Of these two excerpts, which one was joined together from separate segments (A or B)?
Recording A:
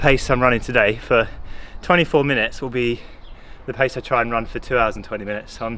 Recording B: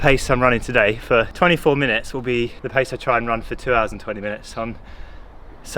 B